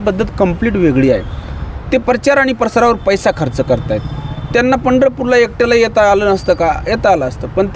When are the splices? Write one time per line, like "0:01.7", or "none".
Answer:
none